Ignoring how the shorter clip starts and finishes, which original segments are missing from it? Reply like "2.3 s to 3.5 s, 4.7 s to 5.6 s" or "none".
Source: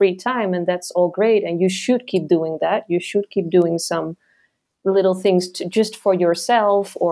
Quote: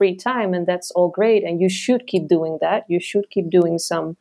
none